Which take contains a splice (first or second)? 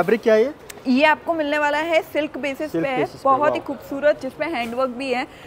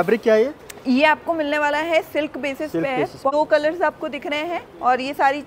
second